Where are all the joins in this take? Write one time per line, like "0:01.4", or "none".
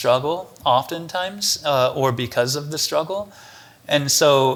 none